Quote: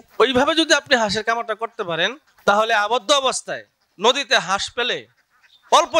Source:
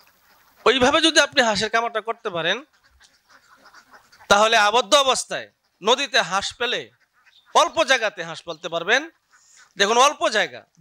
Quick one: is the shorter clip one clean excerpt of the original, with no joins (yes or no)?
no